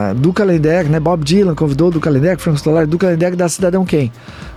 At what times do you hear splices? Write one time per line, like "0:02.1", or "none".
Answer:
none